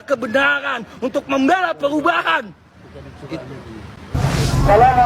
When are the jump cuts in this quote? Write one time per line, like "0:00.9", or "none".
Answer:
0:04.1